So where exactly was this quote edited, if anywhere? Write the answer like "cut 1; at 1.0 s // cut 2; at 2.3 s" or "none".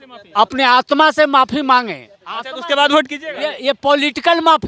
none